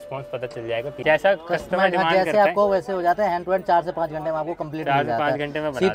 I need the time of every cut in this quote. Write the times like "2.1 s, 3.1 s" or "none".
1.0 s